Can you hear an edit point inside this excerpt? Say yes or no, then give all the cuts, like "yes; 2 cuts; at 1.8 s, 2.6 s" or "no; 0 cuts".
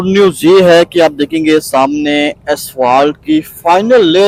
no; 0 cuts